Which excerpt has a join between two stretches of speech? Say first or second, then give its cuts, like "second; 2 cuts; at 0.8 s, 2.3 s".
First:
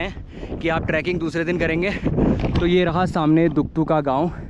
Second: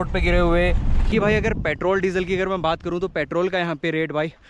second; 1 cut; at 1.1 s